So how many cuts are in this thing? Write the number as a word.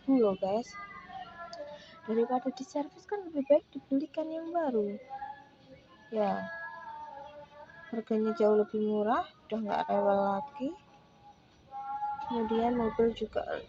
zero